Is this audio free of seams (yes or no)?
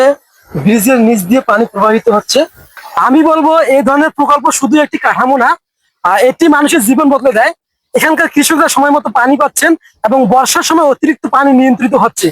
no